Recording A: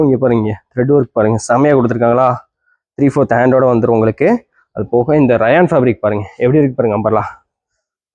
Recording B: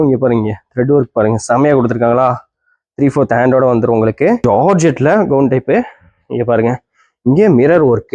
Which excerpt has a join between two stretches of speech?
B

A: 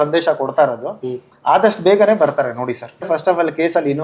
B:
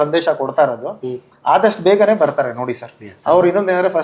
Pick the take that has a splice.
A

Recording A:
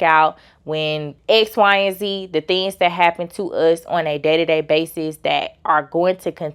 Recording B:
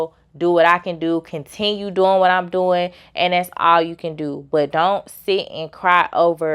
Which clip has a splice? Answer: A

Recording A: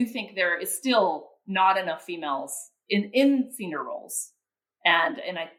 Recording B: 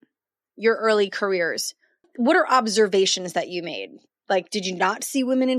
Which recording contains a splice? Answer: B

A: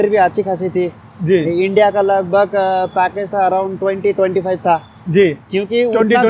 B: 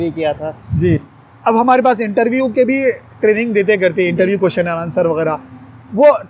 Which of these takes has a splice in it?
B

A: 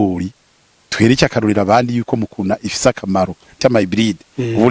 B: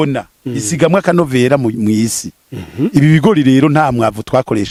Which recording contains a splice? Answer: A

